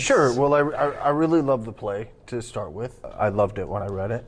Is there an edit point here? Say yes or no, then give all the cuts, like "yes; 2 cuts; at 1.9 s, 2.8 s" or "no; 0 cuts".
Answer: yes; 1 cut; at 3.0 s